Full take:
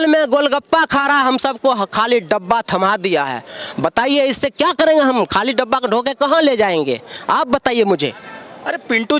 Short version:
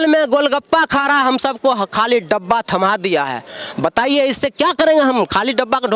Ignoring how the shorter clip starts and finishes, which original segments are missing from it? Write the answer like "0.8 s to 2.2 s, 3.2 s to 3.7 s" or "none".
none